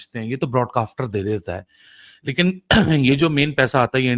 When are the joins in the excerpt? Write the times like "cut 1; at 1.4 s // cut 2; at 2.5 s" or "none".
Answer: none